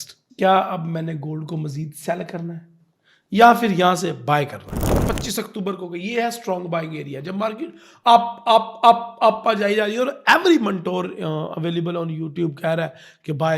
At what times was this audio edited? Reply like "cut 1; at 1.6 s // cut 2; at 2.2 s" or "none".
cut 1; at 4.9 s